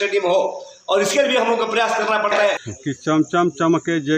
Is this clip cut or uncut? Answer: cut